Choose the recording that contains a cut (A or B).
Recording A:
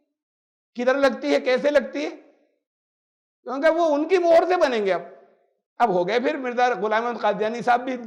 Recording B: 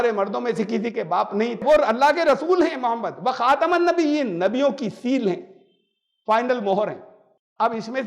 B